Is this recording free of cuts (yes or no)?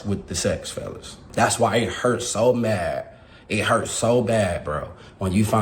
no